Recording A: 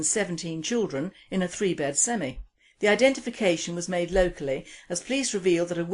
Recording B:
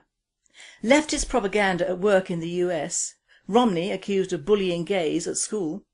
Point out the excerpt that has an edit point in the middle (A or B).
B